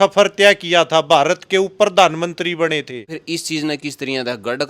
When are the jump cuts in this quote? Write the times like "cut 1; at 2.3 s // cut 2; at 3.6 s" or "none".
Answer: cut 1; at 3.2 s